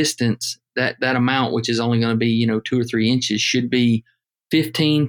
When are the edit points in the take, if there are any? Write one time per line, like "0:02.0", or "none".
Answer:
none